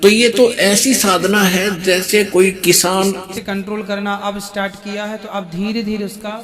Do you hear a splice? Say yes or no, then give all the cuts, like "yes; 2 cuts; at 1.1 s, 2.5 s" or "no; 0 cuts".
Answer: yes; 1 cut; at 3.4 s